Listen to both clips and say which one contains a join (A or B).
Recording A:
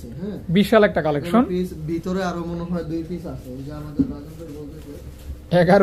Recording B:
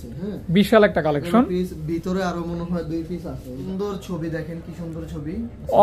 B